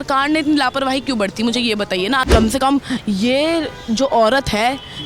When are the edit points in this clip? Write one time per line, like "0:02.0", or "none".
0:02.2